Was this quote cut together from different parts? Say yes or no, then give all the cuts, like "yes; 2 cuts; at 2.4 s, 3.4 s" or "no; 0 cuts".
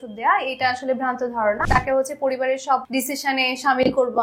yes; 2 cuts; at 1.6 s, 2.9 s